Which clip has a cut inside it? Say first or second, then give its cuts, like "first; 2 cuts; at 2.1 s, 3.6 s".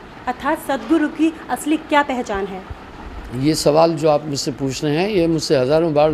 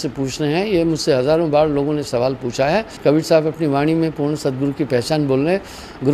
second; 1 cut; at 2.9 s